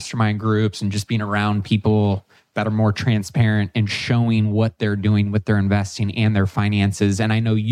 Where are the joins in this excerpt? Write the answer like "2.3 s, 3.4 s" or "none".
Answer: none